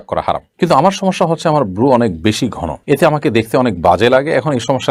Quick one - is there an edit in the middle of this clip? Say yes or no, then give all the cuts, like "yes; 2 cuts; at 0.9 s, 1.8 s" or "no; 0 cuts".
no; 0 cuts